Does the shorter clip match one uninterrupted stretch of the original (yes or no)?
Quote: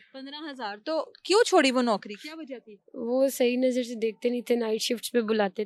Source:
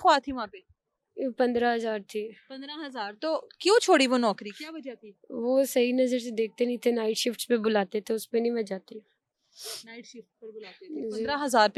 yes